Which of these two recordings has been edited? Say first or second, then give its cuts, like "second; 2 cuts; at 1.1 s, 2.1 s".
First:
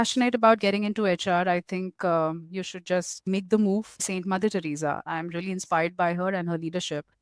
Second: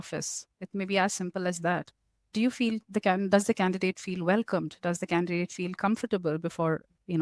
first; 2 cuts; at 3.2 s, 4.1 s